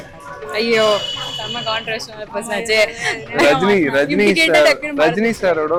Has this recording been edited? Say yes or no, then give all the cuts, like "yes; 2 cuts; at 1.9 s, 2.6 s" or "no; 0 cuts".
no; 0 cuts